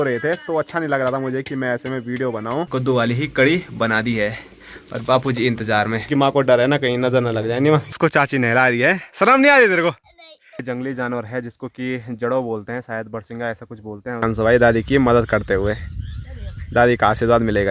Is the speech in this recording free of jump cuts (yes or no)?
no